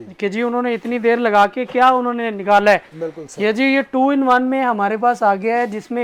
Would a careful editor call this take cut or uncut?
uncut